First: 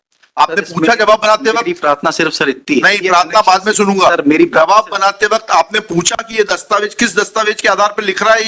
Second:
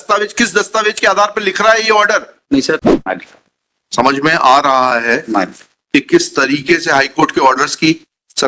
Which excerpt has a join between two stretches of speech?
second; 1 cut; at 2.9 s

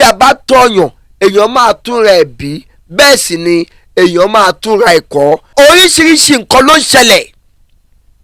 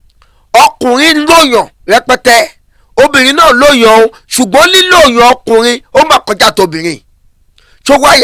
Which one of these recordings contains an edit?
first; 1 cut; at 5.5 s

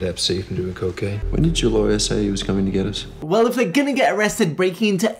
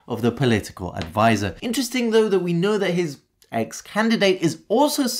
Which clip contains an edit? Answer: first; 1 cut; at 1.2 s

